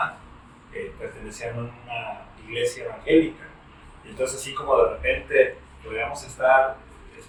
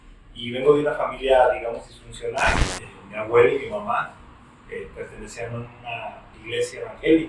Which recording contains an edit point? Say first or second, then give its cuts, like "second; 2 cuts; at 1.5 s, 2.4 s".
second; 1 cut; at 2.7 s